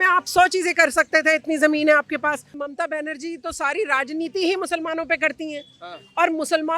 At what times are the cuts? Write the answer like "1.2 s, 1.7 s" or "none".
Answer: 2.5 s